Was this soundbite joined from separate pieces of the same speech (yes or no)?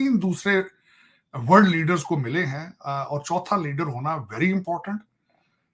no